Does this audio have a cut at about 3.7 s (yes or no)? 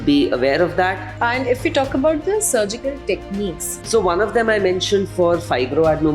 yes